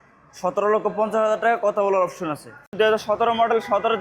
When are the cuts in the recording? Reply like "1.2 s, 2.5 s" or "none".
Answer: 2.7 s